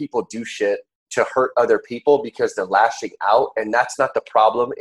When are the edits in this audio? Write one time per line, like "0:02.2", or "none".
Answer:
0:01.0